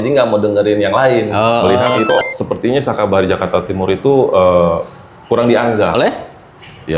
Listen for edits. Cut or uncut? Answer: cut